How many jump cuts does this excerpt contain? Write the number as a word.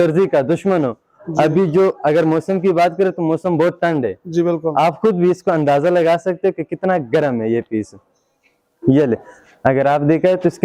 zero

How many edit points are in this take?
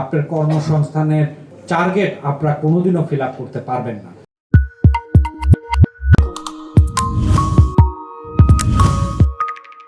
zero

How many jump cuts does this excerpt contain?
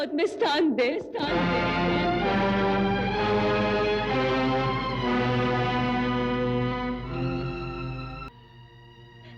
one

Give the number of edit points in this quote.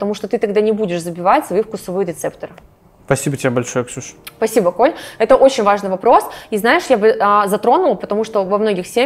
zero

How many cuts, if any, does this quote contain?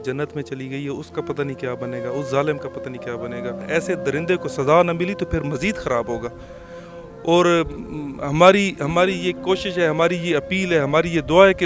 one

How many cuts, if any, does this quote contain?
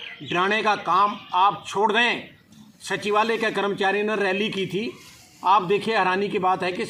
zero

